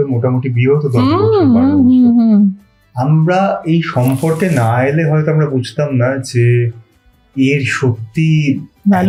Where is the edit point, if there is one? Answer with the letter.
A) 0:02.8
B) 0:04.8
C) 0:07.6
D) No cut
D